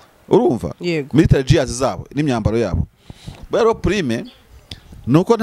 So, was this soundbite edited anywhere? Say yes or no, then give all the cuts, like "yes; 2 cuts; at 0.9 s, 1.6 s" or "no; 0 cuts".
no; 0 cuts